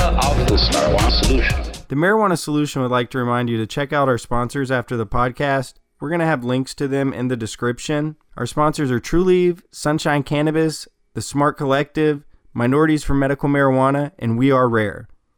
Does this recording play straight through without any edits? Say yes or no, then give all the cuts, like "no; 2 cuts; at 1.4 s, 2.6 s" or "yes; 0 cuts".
no; 1 cut; at 1.8 s